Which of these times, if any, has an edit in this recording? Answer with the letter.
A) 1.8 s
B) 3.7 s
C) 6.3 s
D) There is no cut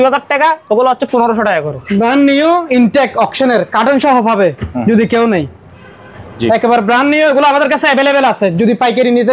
A